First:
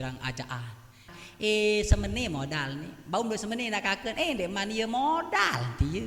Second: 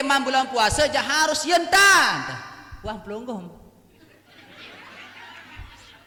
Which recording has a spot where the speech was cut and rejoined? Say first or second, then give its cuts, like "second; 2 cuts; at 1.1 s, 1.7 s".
first; 1 cut; at 1.1 s